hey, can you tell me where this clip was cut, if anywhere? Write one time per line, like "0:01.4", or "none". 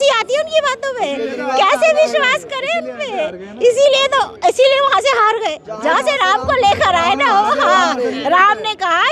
none